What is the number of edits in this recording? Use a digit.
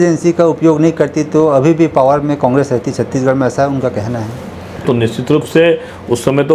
1